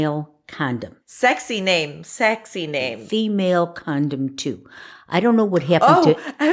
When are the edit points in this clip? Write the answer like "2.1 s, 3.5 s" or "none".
1.1 s, 3.0 s